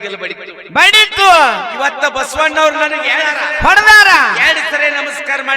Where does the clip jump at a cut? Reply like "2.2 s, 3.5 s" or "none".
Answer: 3.3 s